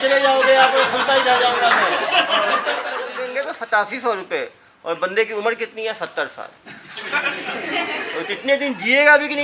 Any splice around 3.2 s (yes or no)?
yes